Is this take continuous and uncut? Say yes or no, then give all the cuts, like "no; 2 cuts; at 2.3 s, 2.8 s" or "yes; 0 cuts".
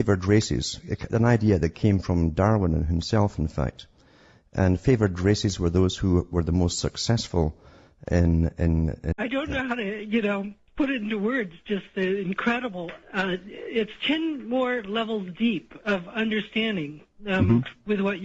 yes; 0 cuts